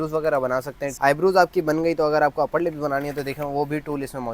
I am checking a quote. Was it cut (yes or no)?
no